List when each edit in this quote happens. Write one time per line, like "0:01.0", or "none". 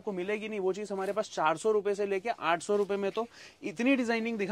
none